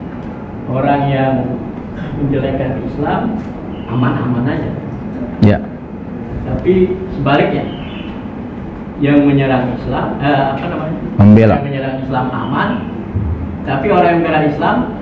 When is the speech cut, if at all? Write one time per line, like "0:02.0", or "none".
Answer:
none